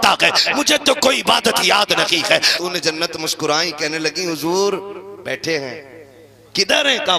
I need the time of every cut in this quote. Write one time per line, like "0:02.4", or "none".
0:02.5

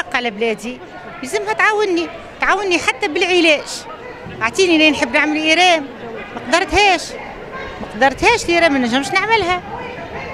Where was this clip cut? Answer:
none

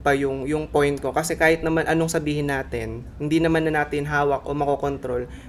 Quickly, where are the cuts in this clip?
none

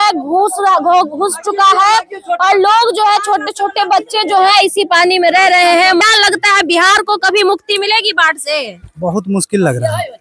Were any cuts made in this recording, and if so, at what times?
0:06.0

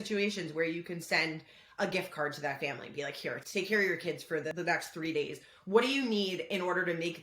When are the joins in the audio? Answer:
0:03.4
0:04.5

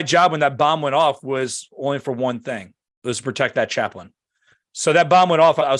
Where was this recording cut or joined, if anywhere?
none

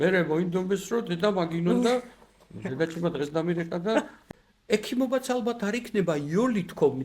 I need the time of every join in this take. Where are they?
0:04.2

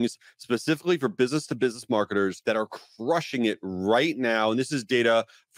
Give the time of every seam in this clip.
0:02.4

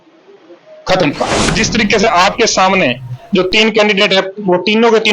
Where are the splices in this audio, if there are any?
0:01.5

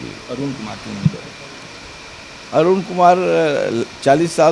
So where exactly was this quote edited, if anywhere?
none

